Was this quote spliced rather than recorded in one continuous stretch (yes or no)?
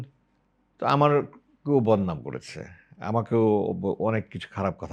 no